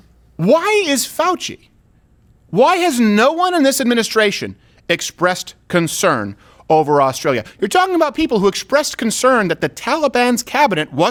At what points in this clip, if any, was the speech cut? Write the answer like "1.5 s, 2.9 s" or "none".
none